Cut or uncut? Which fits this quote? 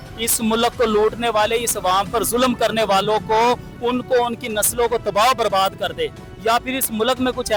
uncut